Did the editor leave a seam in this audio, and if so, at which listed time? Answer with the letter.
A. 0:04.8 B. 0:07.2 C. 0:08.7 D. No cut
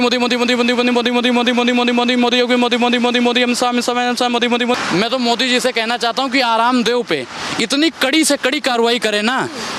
A